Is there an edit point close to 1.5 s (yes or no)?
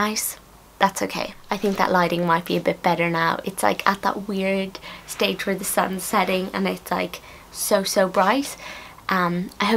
no